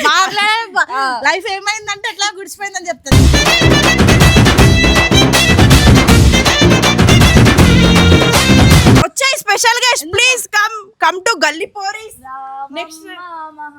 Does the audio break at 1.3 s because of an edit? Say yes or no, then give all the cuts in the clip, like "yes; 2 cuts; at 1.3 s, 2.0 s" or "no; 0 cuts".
no; 1 cut; at 9.1 s